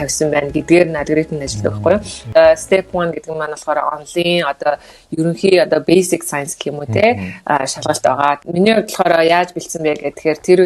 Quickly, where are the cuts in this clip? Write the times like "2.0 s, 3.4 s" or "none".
2.3 s, 8.4 s